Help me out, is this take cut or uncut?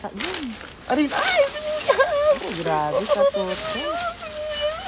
uncut